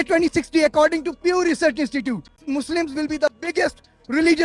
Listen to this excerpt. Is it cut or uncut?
cut